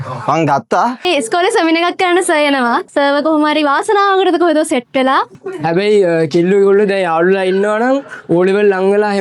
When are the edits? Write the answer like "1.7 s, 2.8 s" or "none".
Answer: 1.0 s, 5.3 s

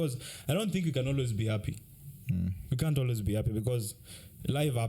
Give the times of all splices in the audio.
none

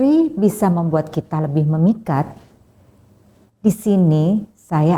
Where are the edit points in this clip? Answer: none

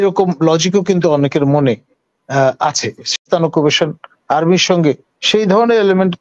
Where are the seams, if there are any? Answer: 3.2 s

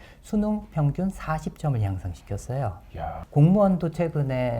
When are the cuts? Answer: 3.2 s

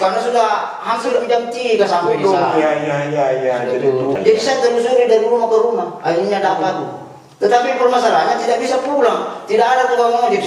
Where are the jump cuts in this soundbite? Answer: 4.2 s

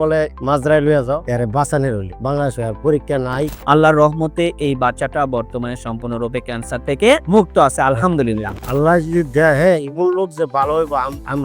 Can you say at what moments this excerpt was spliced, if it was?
1.2 s, 3.5 s, 8.6 s

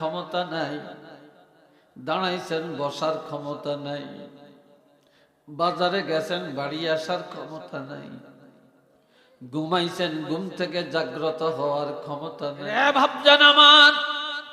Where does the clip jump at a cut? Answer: 12.8 s

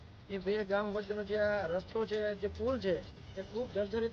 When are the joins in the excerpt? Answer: none

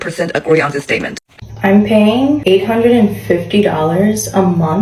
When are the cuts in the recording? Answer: 1.2 s

